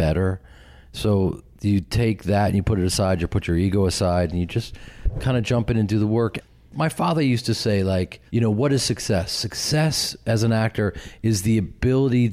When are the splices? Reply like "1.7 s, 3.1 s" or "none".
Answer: 6.4 s, 8.2 s

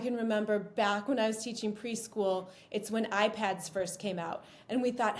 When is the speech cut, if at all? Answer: none

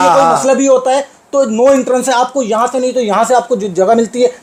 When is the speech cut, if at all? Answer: none

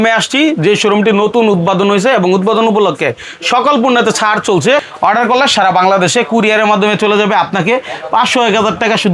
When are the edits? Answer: 4.9 s

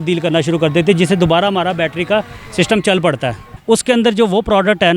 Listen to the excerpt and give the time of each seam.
3.5 s

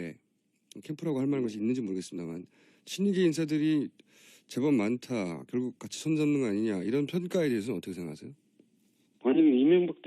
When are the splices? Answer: 4.3 s

